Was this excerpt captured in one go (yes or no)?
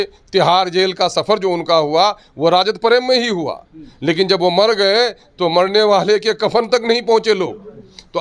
yes